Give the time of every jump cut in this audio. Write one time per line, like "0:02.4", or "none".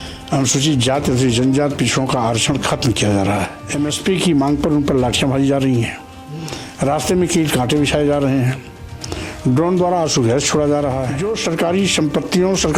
0:03.6
0:11.1